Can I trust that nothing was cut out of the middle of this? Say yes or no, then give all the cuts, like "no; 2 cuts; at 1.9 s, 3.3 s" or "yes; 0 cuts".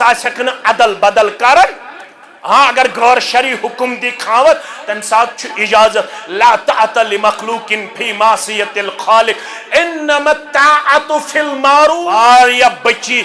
no; 1 cut; at 12.0 s